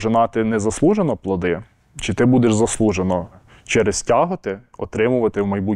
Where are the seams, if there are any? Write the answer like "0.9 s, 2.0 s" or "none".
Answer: 3.5 s